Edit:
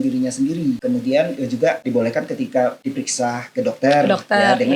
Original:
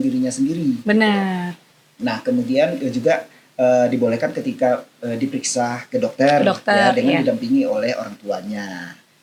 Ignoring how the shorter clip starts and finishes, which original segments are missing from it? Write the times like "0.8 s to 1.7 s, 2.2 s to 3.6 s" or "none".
0.8 s to 2.2 s, 3.3 s to 3.9 s, 4.9 s to 5.2 s

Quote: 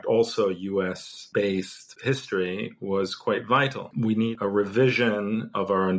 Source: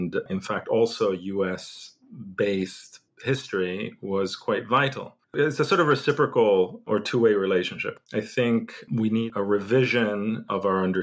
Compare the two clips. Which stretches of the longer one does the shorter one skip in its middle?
1.8 s to 2.2 s, 2.9 s to 3.0 s, 5.1 s to 8.8 s

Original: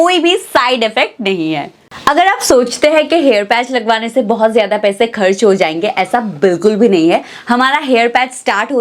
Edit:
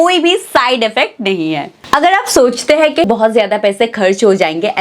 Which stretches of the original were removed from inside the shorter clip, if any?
1.7 s to 1.9 s, 3.2 s to 4.3 s

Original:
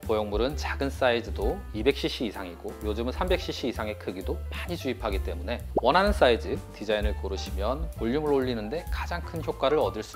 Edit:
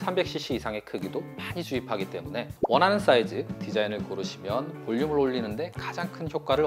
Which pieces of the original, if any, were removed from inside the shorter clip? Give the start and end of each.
none

